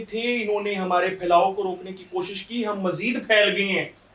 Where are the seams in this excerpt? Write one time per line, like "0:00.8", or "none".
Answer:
none